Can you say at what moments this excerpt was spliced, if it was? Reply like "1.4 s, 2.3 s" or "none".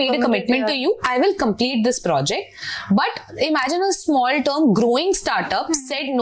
none